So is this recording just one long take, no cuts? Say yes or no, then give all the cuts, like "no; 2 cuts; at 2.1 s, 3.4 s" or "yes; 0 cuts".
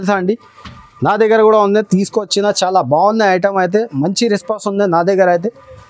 yes; 0 cuts